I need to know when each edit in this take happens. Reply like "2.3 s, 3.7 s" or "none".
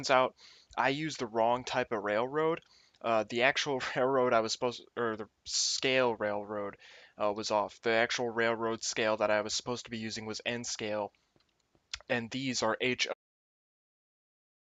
none